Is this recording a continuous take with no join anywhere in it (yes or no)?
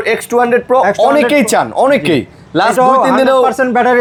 yes